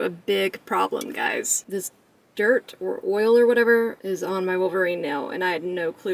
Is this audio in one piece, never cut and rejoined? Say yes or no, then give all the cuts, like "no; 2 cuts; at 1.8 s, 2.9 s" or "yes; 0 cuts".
no; 2 cuts; at 1.6 s, 4.0 s